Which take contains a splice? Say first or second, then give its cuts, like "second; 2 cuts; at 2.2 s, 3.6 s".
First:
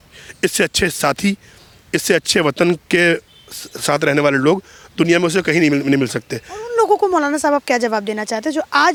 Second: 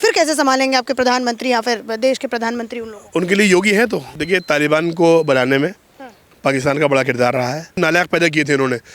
second; 2 cuts; at 4.1 s, 7.8 s